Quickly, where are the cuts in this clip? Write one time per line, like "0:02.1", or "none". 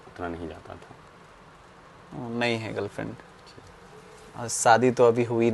none